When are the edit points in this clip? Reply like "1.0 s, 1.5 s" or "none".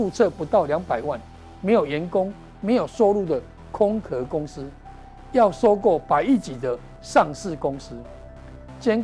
none